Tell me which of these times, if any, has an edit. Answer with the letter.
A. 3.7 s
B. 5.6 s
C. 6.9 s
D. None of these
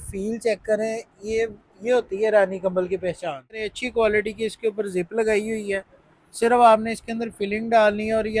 A